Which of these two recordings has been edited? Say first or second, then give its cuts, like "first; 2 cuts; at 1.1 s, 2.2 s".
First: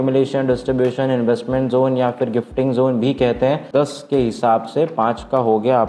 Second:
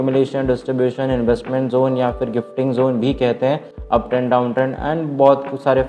first; 1 cut; at 3.7 s